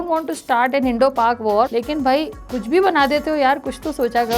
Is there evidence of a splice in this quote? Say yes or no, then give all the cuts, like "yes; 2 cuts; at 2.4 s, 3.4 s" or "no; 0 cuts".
yes; 1 cut; at 1.7 s